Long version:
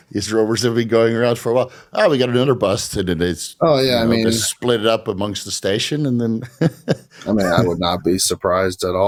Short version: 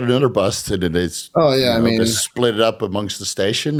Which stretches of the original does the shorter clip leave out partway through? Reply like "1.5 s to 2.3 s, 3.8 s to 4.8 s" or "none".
none